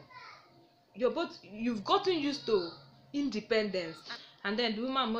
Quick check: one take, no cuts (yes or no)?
no